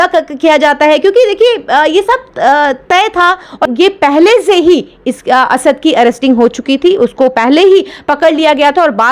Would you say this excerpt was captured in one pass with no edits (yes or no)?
no